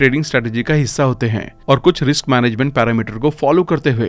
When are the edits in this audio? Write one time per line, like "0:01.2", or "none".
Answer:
none